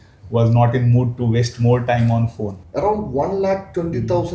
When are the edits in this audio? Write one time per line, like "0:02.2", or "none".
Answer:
0:02.6